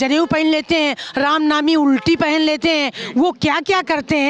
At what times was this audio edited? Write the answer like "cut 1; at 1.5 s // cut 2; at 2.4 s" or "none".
none